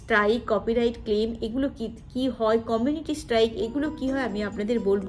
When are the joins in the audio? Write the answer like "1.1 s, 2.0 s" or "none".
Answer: none